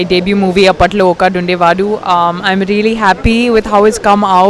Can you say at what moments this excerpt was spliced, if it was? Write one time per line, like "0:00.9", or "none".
none